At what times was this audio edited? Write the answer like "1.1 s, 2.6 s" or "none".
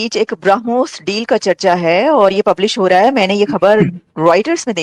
none

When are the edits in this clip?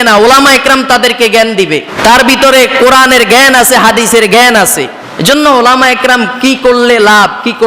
1.9 s, 5.0 s

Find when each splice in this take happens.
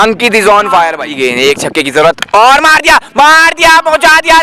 1.0 s

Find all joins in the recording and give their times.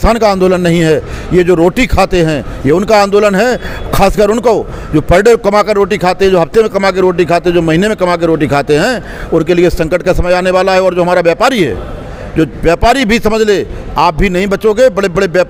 none

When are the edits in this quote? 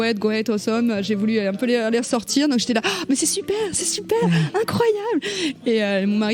none

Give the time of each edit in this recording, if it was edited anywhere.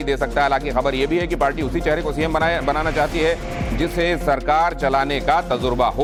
none

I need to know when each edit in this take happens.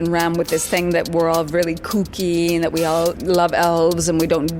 3.2 s

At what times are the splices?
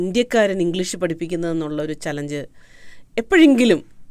none

